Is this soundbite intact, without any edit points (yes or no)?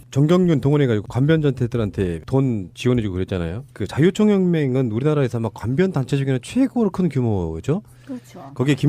yes